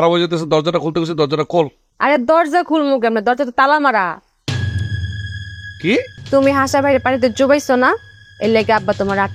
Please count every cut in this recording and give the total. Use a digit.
2